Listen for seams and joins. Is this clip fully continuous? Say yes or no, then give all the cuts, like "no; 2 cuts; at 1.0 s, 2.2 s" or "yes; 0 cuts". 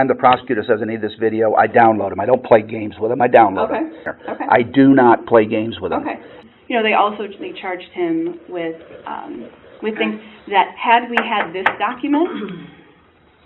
no; 2 cuts; at 4.0 s, 6.3 s